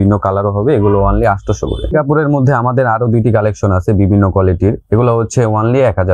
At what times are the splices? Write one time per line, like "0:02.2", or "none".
0:01.8